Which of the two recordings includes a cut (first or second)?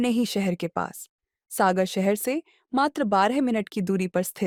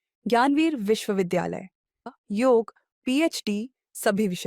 second